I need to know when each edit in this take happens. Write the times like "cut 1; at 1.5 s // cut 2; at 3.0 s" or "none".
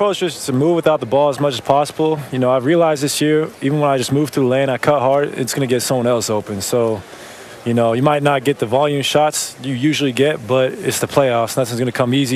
none